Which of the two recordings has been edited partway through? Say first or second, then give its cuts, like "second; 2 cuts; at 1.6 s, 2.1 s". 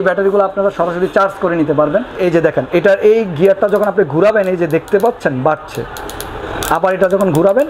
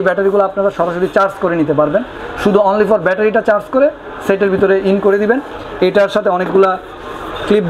first; 1 cut; at 2.2 s